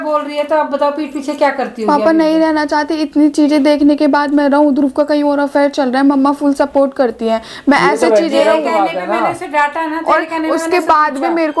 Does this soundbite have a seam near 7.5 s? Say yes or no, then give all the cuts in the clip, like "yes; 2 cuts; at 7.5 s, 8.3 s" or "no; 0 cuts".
no; 0 cuts